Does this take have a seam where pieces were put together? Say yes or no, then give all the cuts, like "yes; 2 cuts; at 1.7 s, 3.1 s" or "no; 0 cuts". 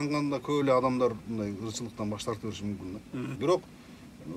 yes; 1 cut; at 3.3 s